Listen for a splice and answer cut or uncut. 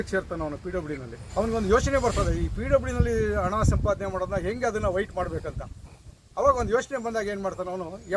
cut